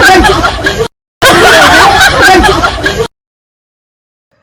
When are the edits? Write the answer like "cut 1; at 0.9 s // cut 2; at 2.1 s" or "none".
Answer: none